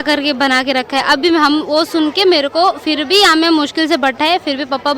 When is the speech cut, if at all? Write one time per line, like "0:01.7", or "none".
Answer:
none